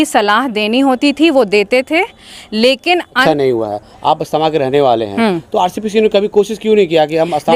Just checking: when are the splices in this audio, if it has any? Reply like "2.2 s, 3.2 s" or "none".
3.2 s